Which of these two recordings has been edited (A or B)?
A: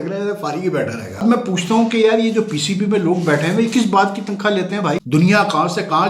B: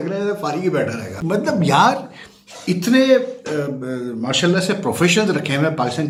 A